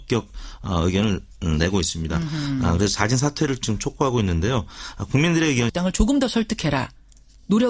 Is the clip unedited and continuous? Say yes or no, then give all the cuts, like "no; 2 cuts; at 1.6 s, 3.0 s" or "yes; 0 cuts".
yes; 0 cuts